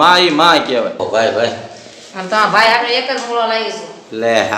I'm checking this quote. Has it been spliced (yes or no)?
yes